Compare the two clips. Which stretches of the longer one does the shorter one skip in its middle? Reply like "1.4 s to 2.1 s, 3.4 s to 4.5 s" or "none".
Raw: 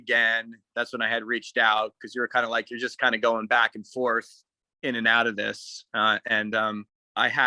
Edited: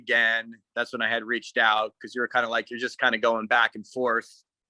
none